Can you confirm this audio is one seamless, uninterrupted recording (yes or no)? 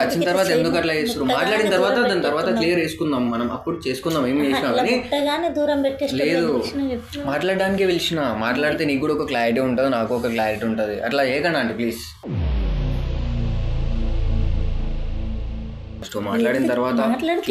no